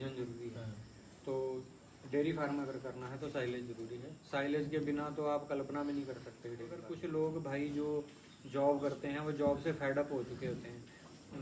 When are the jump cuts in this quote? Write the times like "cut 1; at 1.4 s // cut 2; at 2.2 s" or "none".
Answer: cut 1; at 6.9 s